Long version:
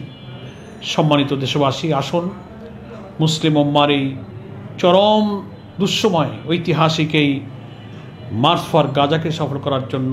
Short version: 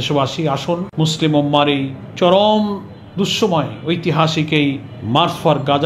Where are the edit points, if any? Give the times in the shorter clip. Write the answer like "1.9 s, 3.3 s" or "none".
0.9 s, 2.0 s, 4.9 s

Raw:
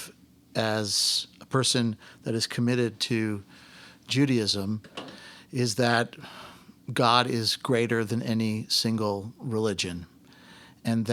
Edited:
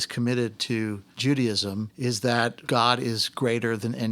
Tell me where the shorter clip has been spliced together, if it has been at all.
1.1 s, 1.9 s, 2.6 s

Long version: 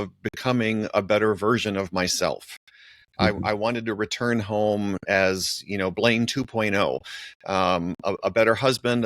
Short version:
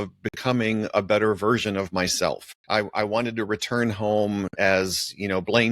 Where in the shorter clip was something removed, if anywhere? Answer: 2.5 s

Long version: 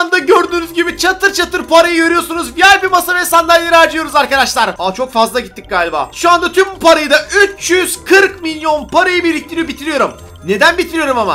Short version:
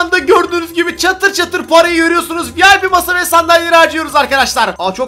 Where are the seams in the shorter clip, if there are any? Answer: none

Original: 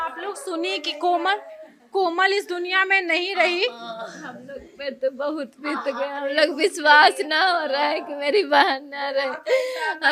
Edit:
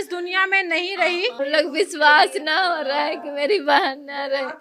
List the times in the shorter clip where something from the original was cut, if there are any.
1.3 s

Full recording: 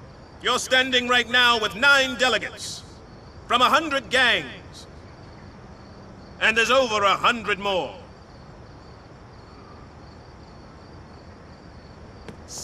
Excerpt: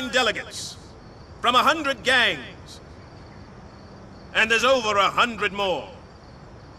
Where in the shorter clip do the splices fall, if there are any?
none

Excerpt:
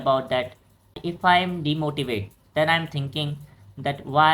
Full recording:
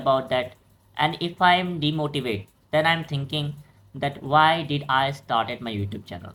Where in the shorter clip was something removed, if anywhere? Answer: 1.0 s

